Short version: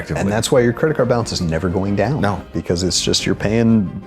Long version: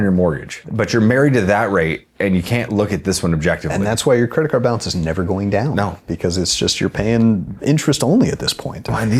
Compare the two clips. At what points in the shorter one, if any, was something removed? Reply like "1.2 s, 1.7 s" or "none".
none